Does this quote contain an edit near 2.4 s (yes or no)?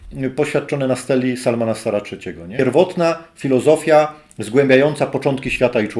yes